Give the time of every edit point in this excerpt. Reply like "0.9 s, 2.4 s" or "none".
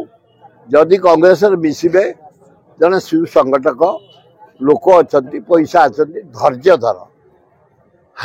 none